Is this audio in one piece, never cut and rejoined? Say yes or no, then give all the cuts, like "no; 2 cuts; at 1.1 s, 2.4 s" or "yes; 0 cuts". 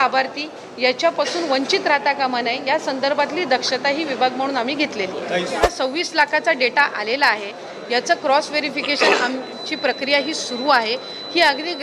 no; 1 cut; at 5.6 s